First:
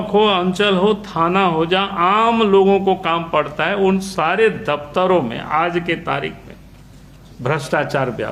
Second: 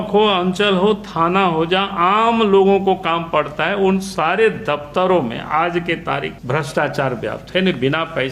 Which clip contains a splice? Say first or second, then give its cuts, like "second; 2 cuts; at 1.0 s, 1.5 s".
second; 1 cut; at 6.4 s